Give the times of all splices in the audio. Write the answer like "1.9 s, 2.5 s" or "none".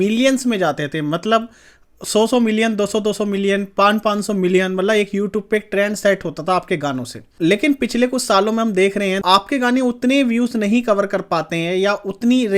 none

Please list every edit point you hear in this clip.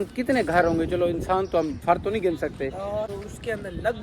3.1 s

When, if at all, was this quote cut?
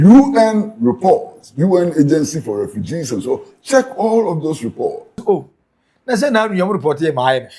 5.1 s

